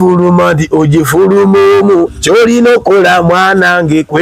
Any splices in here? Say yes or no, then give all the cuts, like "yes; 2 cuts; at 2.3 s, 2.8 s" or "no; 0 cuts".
no; 0 cuts